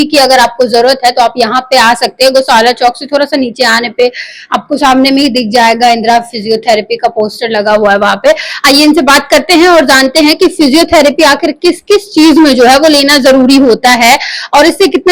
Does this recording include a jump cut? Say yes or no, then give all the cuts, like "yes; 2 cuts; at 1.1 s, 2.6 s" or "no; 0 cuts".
no; 0 cuts